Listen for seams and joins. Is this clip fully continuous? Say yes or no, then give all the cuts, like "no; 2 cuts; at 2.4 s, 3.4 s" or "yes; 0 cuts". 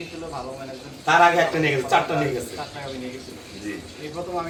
yes; 0 cuts